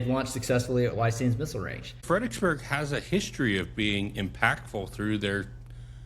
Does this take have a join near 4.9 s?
no; 1 cut; at 2.0 s

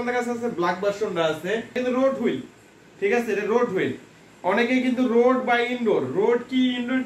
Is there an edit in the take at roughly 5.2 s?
no; 1 cut; at 1.8 s

